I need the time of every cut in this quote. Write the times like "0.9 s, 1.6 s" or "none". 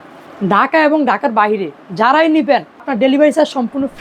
2.9 s